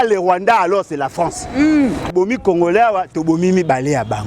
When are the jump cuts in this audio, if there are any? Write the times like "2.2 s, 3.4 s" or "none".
2.1 s